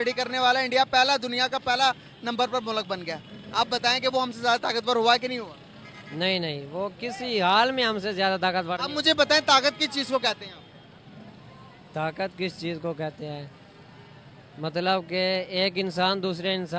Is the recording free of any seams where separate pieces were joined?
yes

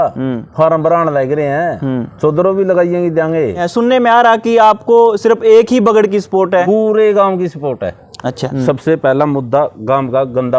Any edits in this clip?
yes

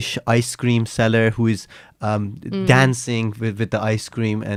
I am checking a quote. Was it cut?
no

